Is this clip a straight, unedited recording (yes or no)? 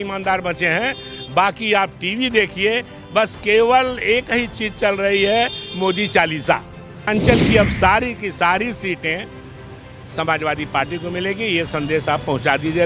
no